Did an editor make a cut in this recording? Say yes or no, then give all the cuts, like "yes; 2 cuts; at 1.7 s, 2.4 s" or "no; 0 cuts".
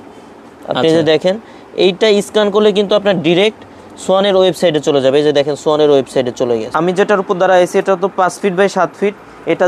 yes; 1 cut; at 6.7 s